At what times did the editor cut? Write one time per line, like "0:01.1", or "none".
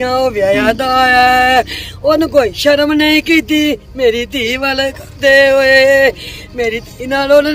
none